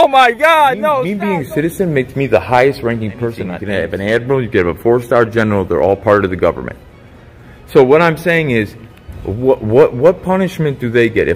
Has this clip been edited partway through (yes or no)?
yes